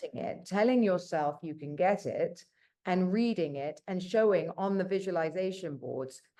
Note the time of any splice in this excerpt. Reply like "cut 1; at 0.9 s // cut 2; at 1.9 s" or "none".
none